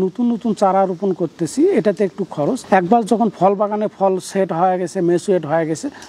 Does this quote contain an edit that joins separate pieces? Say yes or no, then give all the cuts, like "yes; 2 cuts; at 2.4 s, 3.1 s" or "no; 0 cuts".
no; 0 cuts